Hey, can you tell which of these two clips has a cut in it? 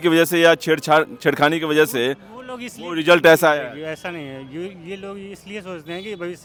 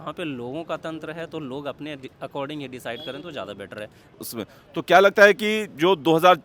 second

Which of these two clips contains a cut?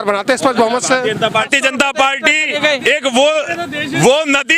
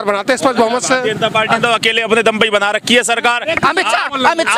first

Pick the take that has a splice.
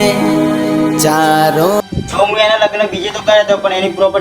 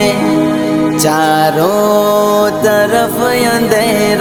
first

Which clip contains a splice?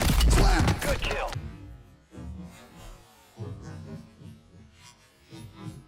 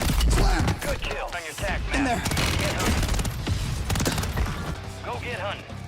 second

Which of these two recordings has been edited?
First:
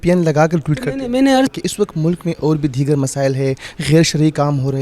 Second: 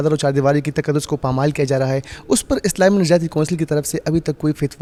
first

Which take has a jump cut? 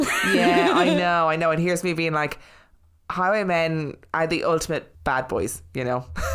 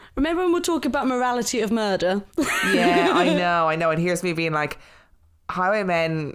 first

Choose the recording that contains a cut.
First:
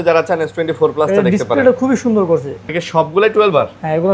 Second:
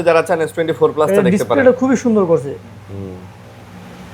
first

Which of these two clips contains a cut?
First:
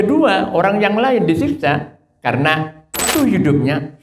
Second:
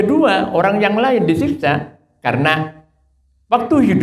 first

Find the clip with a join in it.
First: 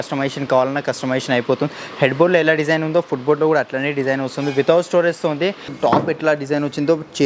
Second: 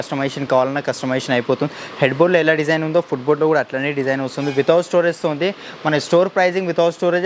first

